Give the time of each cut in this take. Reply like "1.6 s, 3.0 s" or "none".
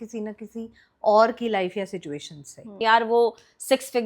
2.8 s